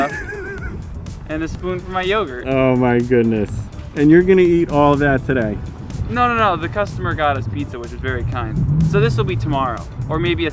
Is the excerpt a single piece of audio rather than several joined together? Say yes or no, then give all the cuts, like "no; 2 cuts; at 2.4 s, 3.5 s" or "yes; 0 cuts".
yes; 0 cuts